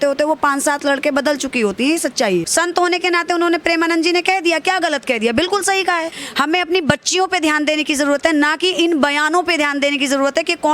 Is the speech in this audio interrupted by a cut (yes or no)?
yes